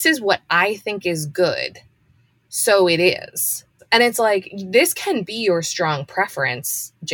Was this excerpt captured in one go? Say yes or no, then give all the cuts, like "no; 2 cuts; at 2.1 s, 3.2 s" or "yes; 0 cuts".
no; 1 cut; at 3.6 s